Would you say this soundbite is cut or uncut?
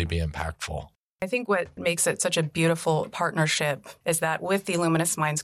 cut